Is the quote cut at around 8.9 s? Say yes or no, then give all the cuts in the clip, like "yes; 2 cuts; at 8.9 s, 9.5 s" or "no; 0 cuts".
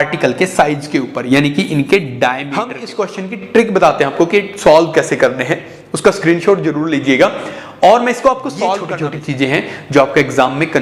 yes; 2 cuts; at 2.8 s, 8.9 s